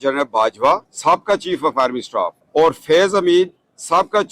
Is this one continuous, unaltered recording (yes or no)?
no